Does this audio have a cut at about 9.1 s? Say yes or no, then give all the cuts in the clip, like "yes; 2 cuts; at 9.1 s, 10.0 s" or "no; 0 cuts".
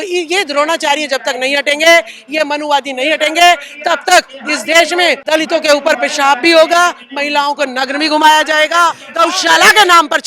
yes; 2 cuts; at 5.2 s, 9.1 s